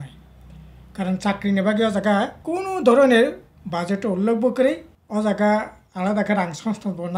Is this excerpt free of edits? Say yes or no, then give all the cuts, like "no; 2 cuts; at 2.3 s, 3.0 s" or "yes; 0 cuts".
no; 2 cuts; at 2.4 s, 4.9 s